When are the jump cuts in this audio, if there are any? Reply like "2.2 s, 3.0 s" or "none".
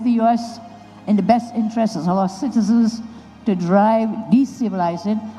none